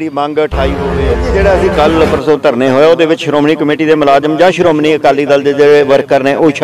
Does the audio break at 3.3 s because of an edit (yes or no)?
no